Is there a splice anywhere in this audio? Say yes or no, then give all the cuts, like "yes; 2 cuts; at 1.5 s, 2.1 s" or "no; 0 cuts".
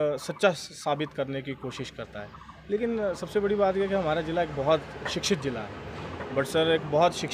no; 0 cuts